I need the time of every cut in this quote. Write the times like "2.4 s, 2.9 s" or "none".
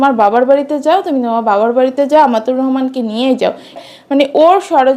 3.8 s